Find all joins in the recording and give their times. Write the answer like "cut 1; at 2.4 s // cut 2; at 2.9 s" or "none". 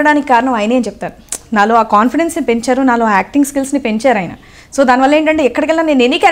none